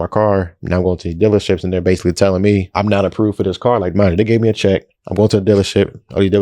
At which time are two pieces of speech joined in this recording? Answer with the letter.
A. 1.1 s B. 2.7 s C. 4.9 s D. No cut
B